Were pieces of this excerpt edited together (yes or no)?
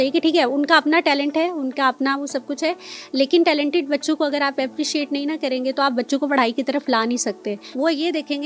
no